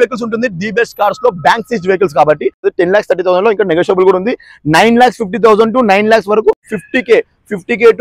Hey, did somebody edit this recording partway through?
yes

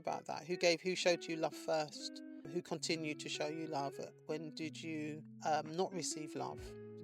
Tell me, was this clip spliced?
yes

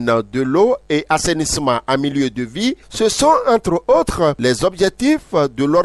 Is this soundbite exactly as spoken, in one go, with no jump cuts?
no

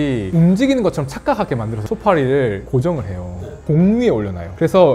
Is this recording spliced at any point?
yes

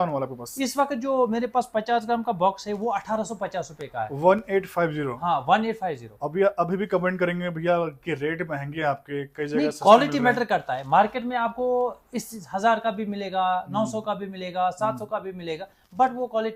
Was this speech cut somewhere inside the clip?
no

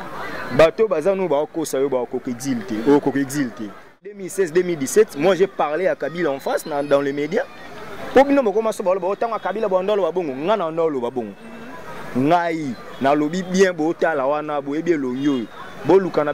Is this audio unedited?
no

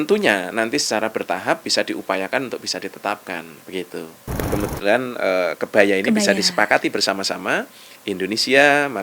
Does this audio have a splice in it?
yes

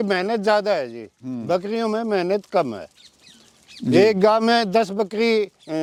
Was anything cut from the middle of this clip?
no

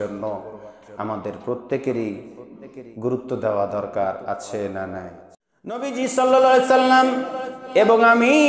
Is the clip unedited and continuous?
no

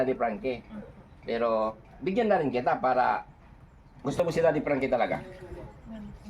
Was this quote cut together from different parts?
yes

